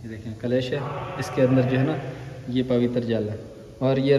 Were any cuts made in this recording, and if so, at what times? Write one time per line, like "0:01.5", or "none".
none